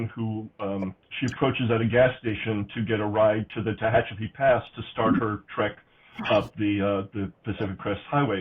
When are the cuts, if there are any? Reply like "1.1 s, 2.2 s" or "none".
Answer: none